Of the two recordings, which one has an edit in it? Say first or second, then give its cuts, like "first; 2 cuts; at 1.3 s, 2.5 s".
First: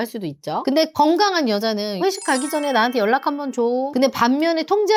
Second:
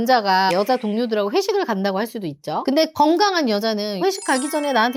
first; 1 cut; at 3.9 s